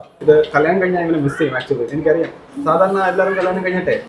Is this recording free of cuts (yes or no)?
yes